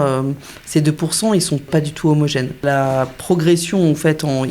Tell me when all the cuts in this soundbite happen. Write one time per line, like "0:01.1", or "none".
0:01.7
0:02.6